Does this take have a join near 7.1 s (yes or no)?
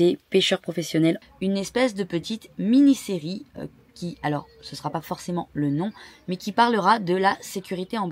no